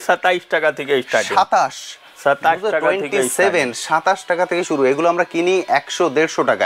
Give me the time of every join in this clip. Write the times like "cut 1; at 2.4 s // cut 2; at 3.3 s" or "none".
none